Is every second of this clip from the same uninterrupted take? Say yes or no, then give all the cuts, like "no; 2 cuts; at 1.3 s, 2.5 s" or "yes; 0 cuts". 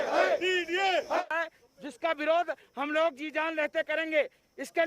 no; 1 cut; at 1.3 s